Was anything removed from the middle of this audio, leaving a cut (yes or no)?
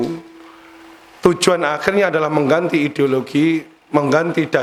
no